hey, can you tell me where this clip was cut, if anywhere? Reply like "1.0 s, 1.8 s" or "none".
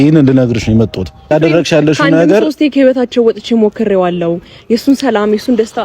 1.3 s